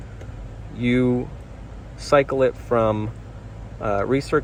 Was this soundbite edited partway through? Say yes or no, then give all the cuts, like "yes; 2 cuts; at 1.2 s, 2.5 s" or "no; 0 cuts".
no; 0 cuts